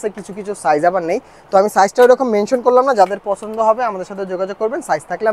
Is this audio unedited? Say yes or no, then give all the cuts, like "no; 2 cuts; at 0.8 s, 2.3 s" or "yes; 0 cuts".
yes; 0 cuts